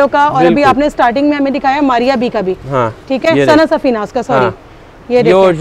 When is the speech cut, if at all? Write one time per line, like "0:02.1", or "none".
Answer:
none